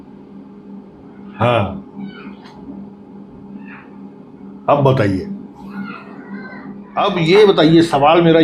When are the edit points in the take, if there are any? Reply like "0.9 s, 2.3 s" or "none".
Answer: 6.8 s